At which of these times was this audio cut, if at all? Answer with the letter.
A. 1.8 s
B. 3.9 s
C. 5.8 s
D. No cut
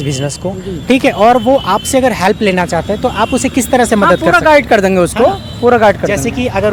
D